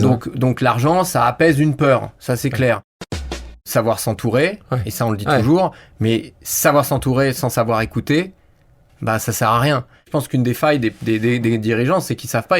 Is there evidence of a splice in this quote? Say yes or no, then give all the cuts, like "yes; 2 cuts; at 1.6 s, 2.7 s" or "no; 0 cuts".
yes; 2 cuts; at 3.4 s, 10.1 s